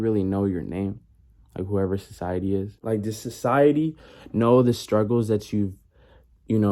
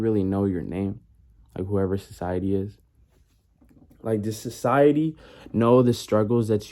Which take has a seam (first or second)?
first